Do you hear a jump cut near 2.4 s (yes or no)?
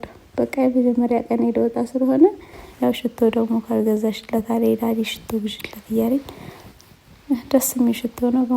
yes